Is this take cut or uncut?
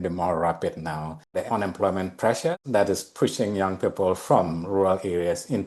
cut